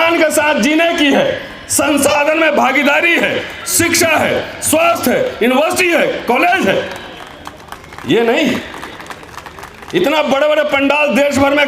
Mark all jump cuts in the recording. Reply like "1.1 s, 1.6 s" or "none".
none